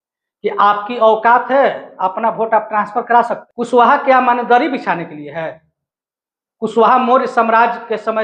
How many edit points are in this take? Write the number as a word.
one